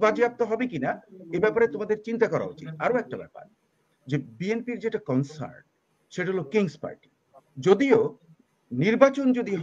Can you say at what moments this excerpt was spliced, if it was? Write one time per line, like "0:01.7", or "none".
none